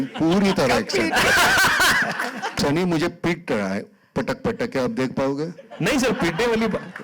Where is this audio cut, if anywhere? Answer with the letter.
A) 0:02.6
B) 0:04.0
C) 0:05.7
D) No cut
A